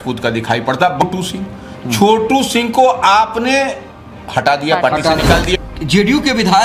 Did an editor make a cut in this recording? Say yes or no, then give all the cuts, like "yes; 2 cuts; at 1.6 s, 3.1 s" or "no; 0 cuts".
yes; 2 cuts; at 1.0 s, 5.6 s